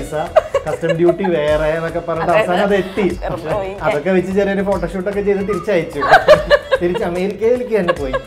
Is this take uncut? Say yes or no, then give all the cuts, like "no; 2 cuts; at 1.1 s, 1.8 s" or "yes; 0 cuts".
no; 1 cut; at 3.2 s